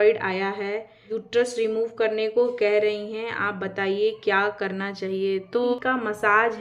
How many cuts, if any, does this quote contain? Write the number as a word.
two